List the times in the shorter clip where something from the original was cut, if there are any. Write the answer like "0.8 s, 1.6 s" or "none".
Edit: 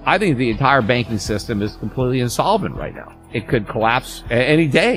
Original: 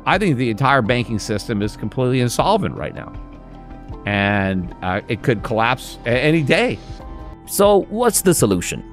3.3 s